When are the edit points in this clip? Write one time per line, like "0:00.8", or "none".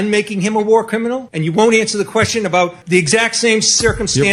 0:01.3
0:02.8